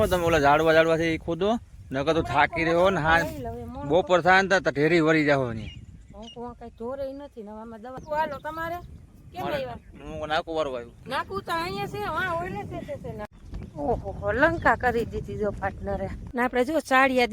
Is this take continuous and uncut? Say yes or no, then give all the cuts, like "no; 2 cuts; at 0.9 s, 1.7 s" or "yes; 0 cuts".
no; 4 cuts; at 8.0 s, 10.9 s, 13.3 s, 16.2 s